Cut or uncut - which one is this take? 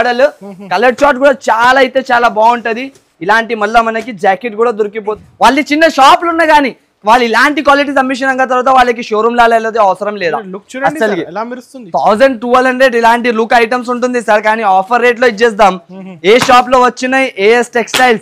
cut